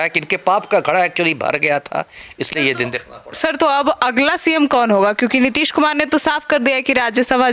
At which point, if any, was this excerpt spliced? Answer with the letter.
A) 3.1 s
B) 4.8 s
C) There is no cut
C